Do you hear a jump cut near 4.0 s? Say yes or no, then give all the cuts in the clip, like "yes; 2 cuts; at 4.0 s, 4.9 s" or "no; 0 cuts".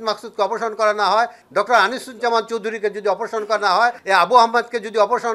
yes; 2 cuts; at 1.4 s, 4.0 s